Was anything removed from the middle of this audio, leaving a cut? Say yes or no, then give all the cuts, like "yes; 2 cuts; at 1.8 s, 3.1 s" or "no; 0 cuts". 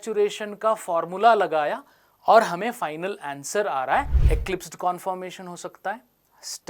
yes; 1 cut; at 4.2 s